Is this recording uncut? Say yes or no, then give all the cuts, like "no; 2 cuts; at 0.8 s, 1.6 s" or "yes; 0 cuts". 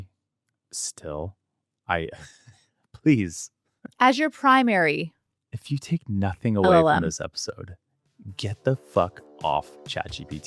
yes; 0 cuts